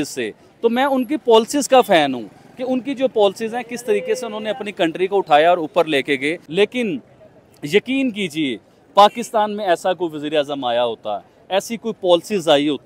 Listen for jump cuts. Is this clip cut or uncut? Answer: cut